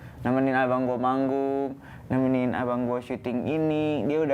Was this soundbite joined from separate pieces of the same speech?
no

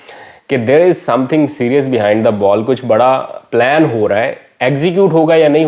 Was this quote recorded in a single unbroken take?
yes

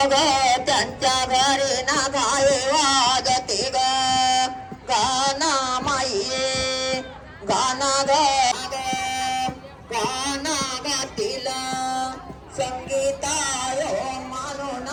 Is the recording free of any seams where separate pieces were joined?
yes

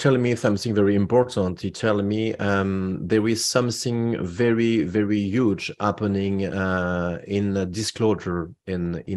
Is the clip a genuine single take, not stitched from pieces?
yes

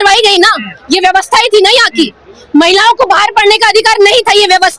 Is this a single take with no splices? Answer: yes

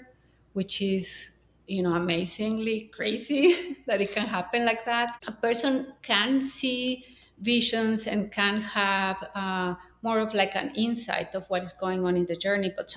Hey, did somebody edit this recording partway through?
yes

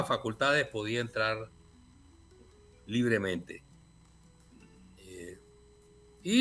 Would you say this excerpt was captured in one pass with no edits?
yes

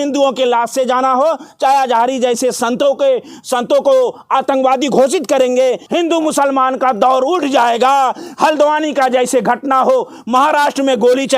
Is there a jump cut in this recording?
yes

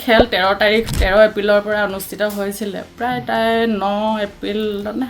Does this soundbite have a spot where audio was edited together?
no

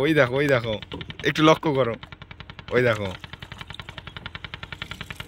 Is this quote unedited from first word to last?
yes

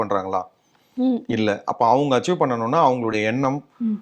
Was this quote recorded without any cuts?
yes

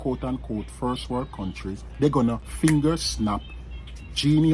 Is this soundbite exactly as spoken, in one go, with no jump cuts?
no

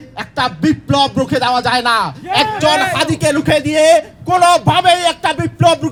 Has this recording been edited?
no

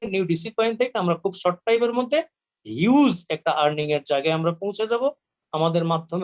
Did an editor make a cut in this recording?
no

